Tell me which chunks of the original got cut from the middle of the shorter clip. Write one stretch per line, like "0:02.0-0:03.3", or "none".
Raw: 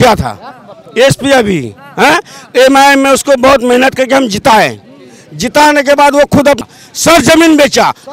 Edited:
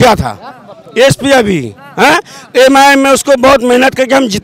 none